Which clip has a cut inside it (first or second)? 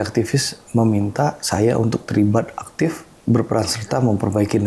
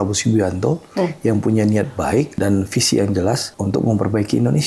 second